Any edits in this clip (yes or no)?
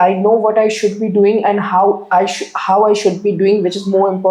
no